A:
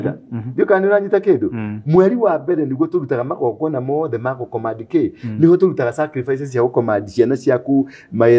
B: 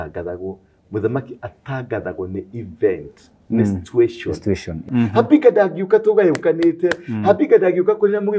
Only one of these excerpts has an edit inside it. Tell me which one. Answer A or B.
B